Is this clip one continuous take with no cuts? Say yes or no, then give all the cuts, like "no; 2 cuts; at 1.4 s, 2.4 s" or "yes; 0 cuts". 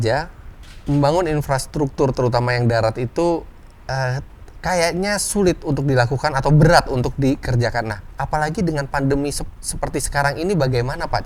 yes; 0 cuts